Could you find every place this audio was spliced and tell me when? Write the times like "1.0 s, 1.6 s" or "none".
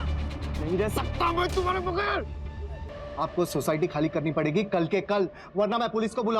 2.9 s